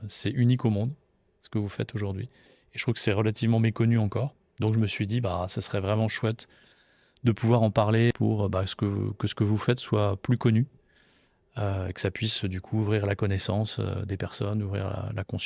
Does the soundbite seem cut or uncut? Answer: cut